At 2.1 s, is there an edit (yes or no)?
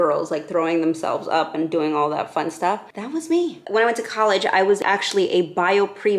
no